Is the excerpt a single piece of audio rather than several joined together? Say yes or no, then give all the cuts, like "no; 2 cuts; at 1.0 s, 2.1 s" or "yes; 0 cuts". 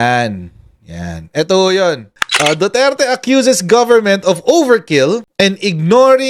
no; 2 cuts; at 2.1 s, 5.3 s